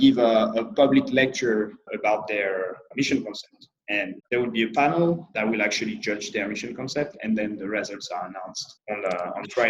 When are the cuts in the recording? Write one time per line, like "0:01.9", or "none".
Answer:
0:01.9
0:02.9
0:04.2
0:05.3
0:08.7